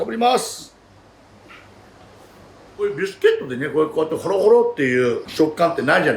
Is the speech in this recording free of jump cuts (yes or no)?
no